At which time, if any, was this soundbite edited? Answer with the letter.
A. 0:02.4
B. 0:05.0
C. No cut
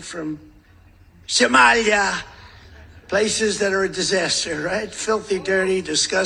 C